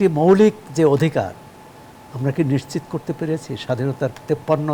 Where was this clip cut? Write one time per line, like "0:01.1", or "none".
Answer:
none